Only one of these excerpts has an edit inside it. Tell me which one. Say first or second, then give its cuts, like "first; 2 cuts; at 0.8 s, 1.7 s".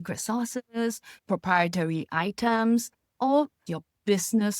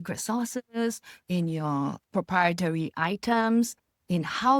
first; 2 cuts; at 1.2 s, 3.1 s